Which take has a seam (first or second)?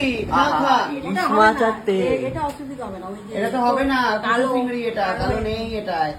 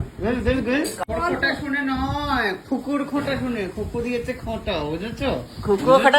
second